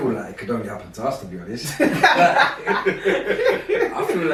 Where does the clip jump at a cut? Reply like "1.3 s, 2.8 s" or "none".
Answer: none